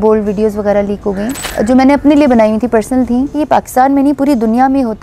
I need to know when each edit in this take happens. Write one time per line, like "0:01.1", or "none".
0:01.4
0:03.4